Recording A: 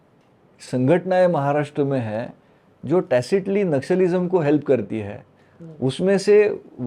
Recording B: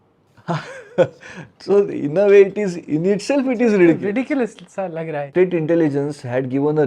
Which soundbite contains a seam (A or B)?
B